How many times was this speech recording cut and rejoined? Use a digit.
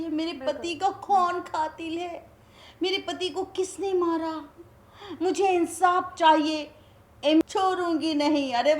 1